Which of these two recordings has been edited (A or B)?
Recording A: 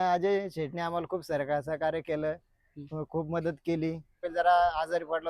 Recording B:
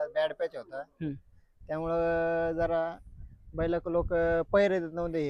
A